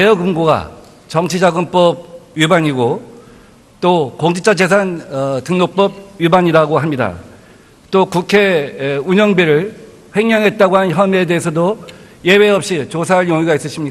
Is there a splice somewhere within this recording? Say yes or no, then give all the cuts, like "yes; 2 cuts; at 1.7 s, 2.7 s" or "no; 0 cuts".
no; 0 cuts